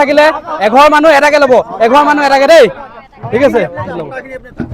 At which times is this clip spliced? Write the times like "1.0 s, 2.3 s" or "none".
none